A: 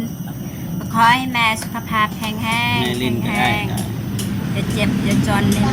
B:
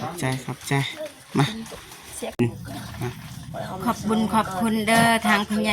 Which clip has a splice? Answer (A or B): B